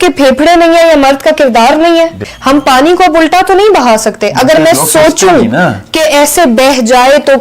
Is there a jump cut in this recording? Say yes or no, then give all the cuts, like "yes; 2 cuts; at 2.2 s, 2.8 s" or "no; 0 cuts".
yes; 1 cut; at 2.3 s